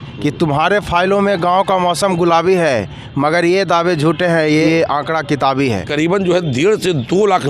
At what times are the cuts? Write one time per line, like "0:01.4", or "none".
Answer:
0:04.7
0:05.9